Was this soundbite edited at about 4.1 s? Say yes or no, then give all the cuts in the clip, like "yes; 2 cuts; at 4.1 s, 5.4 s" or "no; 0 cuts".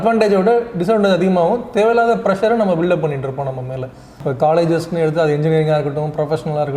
yes; 1 cut; at 4.1 s